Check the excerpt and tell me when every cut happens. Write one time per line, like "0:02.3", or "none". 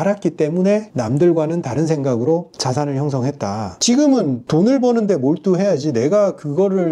0:00.9
0:02.5
0:03.7